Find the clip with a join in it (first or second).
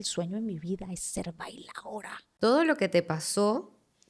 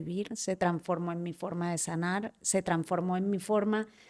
first